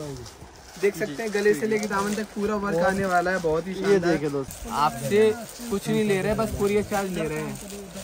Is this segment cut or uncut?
cut